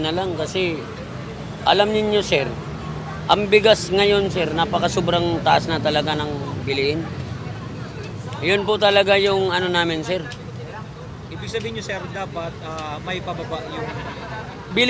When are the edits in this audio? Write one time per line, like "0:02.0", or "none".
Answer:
none